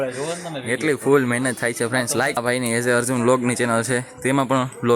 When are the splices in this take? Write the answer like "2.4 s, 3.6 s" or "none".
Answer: 2.4 s